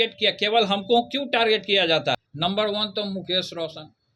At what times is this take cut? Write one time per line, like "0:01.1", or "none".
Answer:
0:02.3